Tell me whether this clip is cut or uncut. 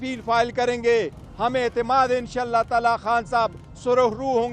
uncut